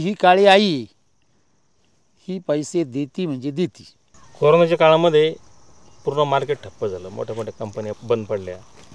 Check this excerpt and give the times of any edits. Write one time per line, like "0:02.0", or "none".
none